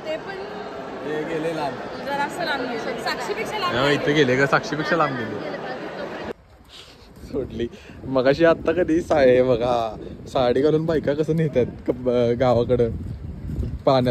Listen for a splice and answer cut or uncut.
uncut